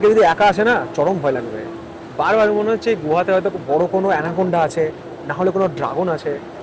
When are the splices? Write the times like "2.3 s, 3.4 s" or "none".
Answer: none